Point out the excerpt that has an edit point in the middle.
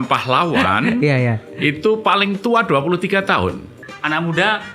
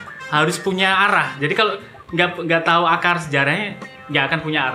first; 1 cut; at 3.7 s

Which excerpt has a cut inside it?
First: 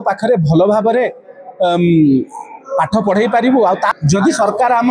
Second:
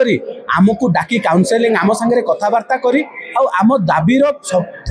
first; 1 cut; at 3.9 s

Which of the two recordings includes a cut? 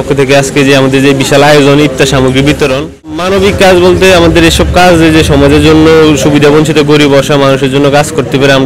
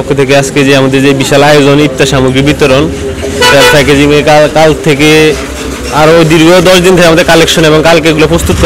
first; 1 cut; at 3.2 s

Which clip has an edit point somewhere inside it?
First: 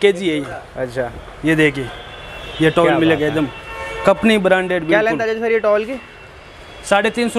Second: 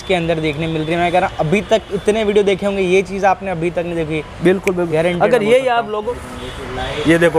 second; 1 cut; at 6.0 s

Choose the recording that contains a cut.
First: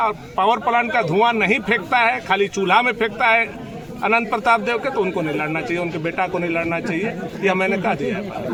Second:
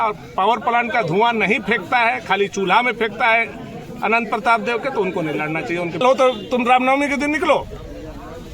second; 1 cut; at 6.0 s

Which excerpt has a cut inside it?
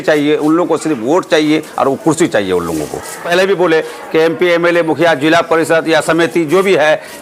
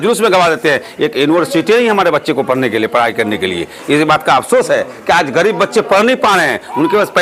first; 1 cut; at 3.3 s

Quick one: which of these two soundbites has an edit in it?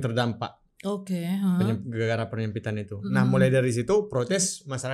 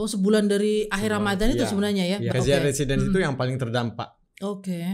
second; 1 cut; at 2.3 s

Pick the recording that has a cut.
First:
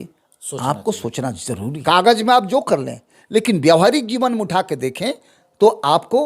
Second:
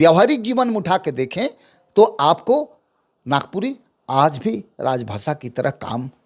first; 1 cut; at 1.8 s

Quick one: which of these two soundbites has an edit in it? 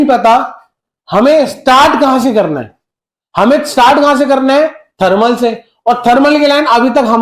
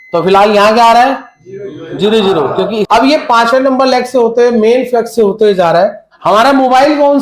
second; 2 cuts; at 2.9 s, 6.1 s

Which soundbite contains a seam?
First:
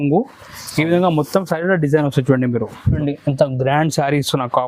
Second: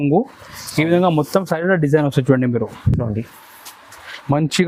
first; 1 cut; at 3.0 s

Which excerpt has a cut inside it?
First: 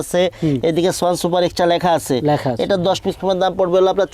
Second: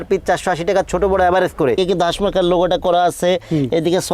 second; 1 cut; at 1.8 s

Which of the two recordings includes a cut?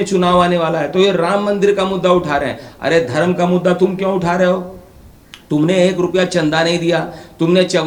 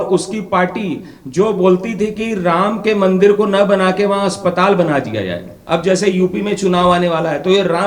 second; 1 cut; at 5.6 s

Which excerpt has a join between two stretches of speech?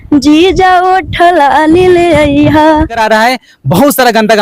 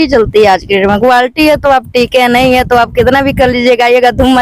first; 1 cut; at 3.0 s

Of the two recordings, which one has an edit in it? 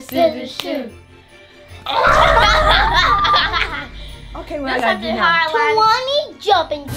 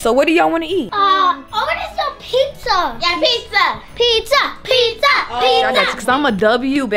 second; 2 cuts; at 0.9 s, 5.9 s

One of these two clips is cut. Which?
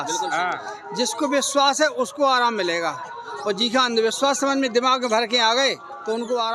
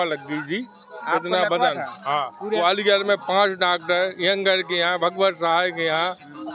second; 1 cut; at 2.6 s

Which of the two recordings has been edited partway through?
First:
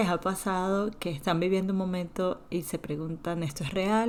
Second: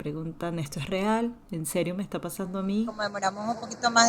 second; 1 cut; at 3.0 s

